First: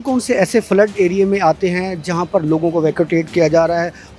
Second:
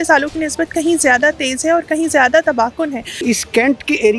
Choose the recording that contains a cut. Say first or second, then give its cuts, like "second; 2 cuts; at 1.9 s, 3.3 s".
second; 1 cut; at 3.2 s